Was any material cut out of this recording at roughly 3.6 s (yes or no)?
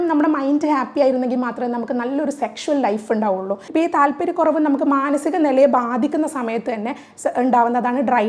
yes